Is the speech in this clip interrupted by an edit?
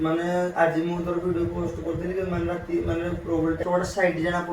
yes; 1 cut; at 3.6 s

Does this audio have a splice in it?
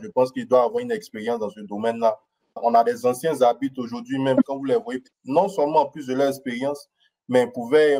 yes; 2 cuts; at 2.6 s, 5.1 s

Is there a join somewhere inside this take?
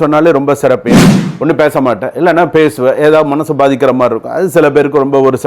yes; 1 cut; at 1.0 s

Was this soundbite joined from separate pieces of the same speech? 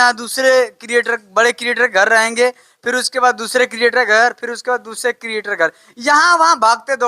no; 0 cuts

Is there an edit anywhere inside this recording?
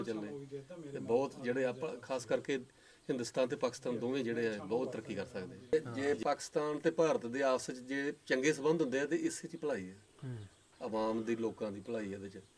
yes; 1 cut; at 5.7 s

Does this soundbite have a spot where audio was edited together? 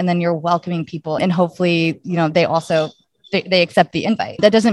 no; 0 cuts

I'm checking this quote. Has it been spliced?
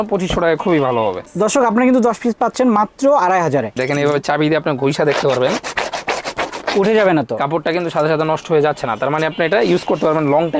yes; 1 cut; at 3.8 s

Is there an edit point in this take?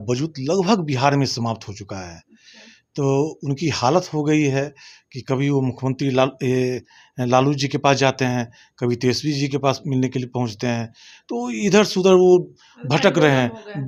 no; 0 cuts

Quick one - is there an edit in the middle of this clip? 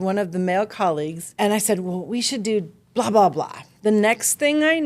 yes; 2 cuts; at 1.2 s, 3.6 s

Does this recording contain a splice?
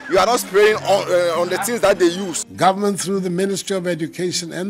yes; 1 cut; at 2.3 s

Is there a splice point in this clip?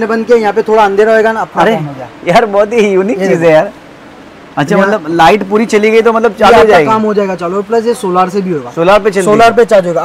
no; 0 cuts

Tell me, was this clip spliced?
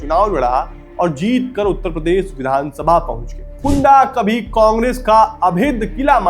yes; 1 cut; at 3.6 s

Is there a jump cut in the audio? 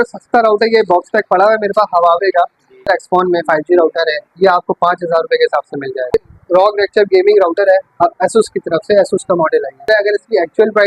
yes; 3 cuts; at 2.9 s, 6.1 s, 9.9 s

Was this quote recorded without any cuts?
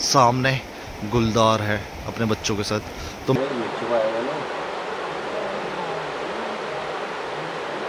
no; 1 cut; at 3.3 s

